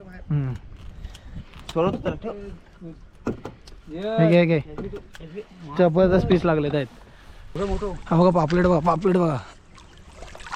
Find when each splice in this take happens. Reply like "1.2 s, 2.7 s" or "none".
7.5 s